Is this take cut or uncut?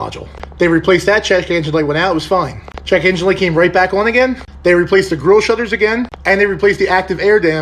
uncut